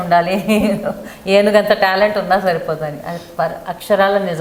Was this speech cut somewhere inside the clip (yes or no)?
no